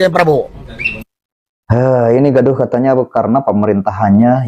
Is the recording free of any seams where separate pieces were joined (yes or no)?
yes